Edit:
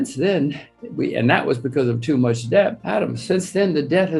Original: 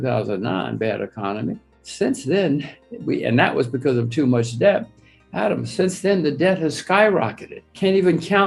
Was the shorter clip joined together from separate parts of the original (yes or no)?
yes